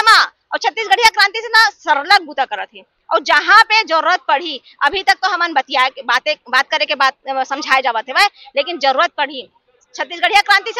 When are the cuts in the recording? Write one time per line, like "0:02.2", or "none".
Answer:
none